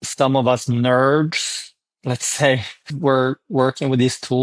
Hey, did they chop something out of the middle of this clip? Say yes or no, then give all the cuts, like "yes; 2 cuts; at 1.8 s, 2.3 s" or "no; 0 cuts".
yes; 1 cut; at 2.9 s